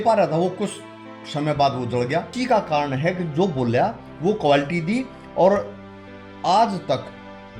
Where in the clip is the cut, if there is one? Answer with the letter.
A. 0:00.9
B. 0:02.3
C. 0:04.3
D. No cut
B